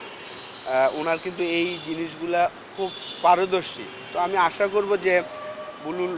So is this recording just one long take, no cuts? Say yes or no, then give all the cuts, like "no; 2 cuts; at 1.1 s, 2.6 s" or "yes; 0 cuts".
yes; 0 cuts